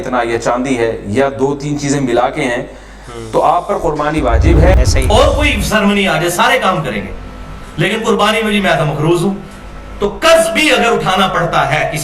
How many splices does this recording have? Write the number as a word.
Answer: one